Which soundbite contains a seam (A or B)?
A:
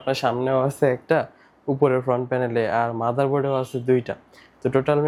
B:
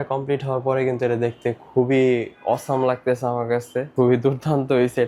B